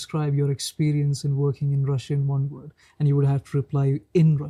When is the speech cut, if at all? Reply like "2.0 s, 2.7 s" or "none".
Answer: none

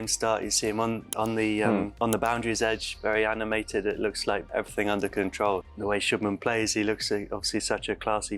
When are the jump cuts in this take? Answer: 1.9 s, 4.4 s, 5.7 s

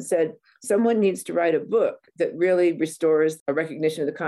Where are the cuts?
3.4 s

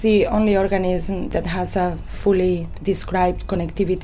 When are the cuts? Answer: 1.3 s, 2.7 s

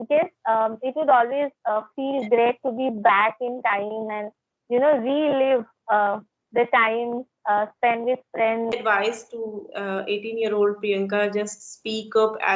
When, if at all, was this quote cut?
8.7 s

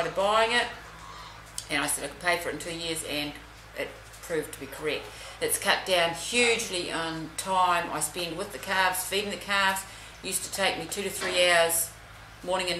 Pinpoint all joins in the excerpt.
5.2 s

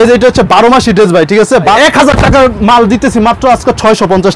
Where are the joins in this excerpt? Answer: 1.8 s

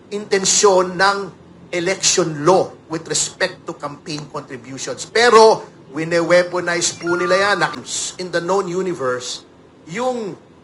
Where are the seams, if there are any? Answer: 7.8 s

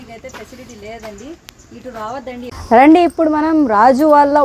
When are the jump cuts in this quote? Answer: 2.6 s

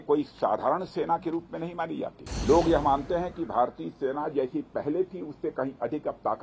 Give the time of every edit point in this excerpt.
2.3 s

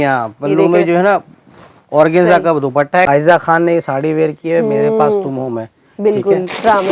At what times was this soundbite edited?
3.1 s

